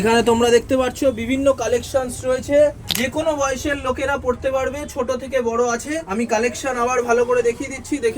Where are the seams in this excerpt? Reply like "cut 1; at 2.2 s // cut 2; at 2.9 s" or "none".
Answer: cut 1; at 2.8 s